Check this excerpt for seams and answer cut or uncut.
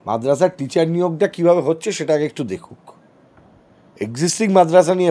uncut